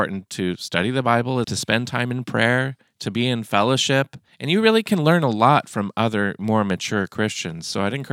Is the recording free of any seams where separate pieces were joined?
no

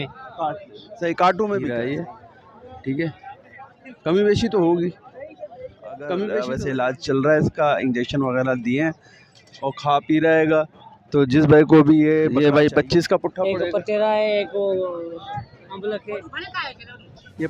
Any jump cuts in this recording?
yes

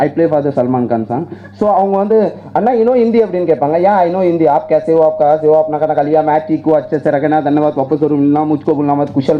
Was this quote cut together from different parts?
no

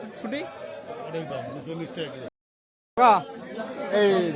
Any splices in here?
yes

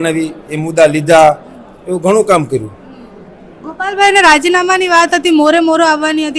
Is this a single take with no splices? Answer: yes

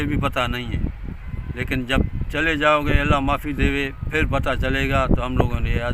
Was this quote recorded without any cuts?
yes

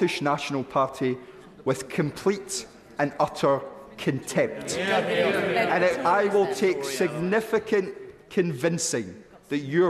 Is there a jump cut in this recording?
no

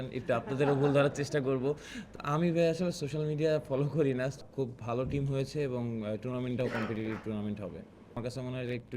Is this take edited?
yes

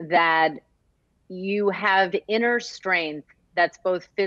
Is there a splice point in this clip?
no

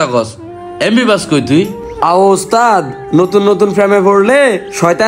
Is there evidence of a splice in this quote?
no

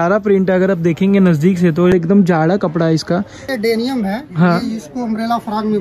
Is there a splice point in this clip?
yes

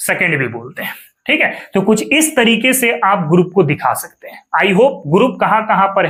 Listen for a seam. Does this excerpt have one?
no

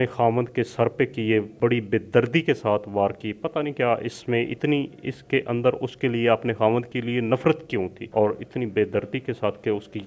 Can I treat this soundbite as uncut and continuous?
no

